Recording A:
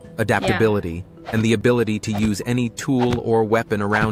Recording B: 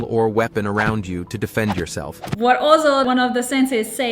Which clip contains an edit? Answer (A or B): B